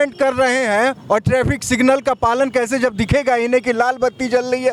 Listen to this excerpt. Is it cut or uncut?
uncut